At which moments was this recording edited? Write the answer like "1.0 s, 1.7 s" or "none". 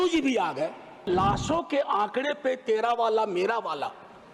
1.1 s